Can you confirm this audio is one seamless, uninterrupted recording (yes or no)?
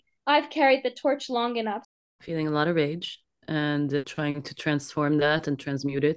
no